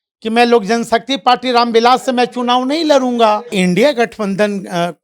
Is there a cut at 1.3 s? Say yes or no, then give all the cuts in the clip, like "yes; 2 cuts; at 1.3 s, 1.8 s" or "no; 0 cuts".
no; 1 cut; at 3.5 s